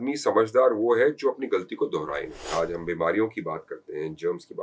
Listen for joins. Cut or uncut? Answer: cut